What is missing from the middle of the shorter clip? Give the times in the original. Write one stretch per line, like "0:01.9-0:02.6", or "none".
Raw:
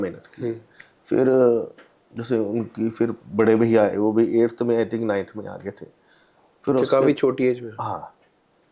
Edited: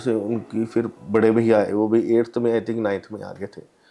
none